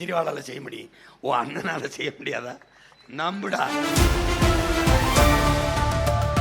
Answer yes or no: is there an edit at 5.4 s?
no